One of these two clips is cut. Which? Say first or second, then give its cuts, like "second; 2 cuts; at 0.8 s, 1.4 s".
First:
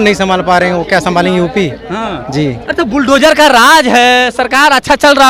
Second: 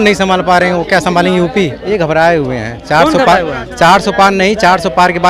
second; 1 cut; at 1.8 s